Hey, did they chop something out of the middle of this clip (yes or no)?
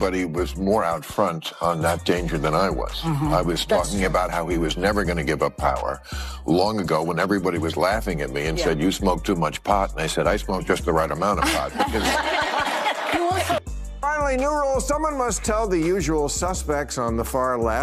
yes